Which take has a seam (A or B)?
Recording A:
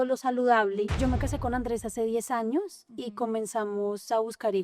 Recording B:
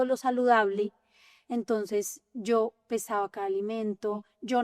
A